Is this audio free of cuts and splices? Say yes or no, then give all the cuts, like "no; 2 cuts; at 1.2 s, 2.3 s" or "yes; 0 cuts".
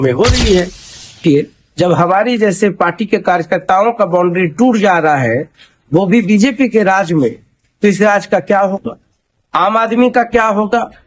no; 1 cut; at 1.2 s